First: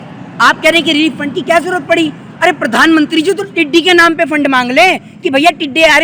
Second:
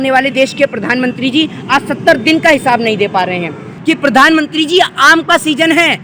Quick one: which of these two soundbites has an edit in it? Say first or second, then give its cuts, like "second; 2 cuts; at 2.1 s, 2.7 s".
second; 1 cut; at 3.7 s